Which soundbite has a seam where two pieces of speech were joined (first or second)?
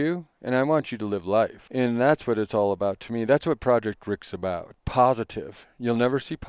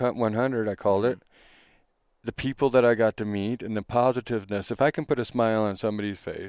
first